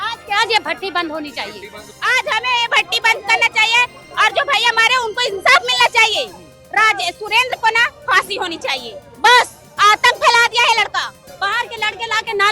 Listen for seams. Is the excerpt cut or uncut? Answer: cut